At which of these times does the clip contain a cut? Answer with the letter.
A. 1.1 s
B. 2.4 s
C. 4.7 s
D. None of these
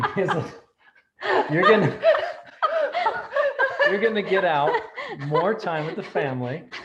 D